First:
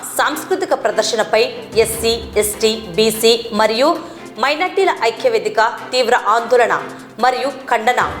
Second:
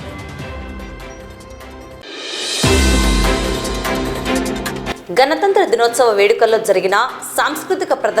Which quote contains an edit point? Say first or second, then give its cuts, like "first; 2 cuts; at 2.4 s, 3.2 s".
second; 2 cuts; at 1.6 s, 4.7 s